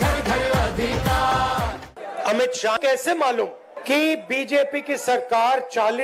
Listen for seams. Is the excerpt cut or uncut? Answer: cut